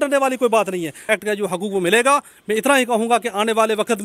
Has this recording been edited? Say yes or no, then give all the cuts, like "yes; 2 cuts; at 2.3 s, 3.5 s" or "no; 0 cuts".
yes; 1 cut; at 1.0 s